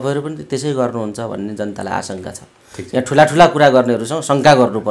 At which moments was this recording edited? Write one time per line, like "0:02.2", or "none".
none